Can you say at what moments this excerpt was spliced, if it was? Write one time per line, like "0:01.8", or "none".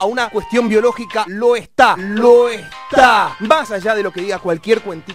0:03.3